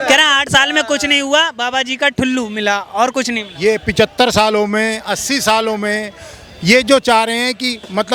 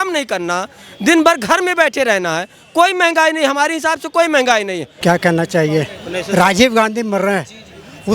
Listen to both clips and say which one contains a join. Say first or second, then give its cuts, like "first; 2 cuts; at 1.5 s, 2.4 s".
second; 1 cut; at 4.9 s